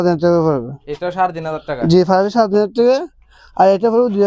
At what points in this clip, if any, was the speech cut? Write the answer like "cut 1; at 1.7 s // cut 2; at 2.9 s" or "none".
none